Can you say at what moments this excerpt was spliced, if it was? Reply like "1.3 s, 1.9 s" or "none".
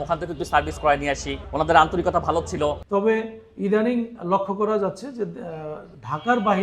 2.8 s